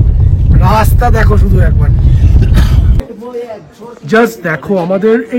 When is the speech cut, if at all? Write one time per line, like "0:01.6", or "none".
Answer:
0:03.0